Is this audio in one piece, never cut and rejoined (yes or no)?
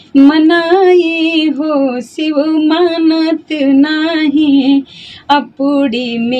yes